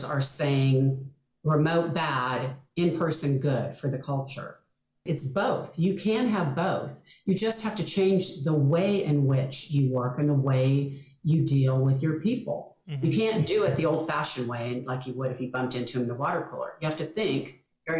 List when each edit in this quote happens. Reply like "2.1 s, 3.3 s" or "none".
5.0 s